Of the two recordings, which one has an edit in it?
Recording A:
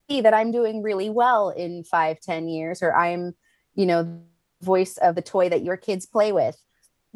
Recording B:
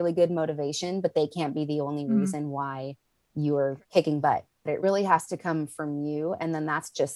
B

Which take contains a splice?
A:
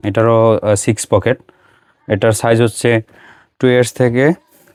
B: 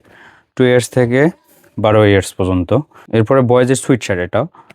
B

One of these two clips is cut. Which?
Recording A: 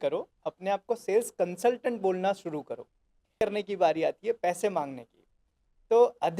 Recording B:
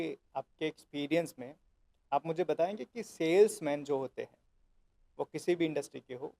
A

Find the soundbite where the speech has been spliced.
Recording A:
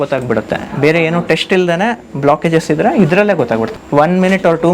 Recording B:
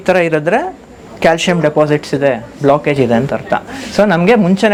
A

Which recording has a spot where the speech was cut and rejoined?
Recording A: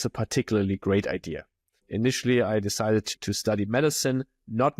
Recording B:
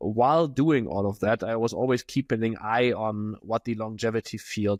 A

